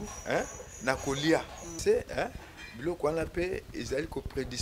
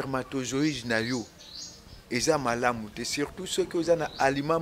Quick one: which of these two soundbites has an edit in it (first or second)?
first